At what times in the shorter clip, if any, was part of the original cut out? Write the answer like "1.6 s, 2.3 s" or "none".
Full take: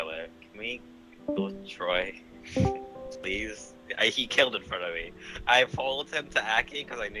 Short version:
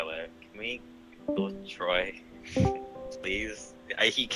none